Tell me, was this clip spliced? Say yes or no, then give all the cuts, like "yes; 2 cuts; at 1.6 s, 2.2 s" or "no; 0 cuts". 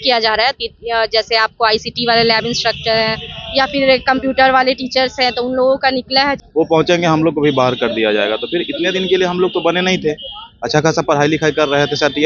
yes; 1 cut; at 6.4 s